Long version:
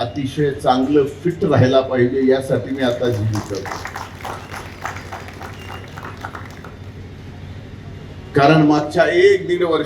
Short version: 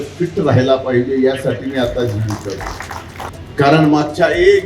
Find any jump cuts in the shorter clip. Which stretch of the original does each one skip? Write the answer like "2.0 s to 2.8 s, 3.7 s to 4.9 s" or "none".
4.4 s to 8.1 s